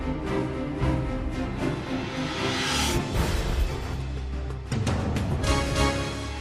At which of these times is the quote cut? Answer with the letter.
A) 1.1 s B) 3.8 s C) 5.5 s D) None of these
A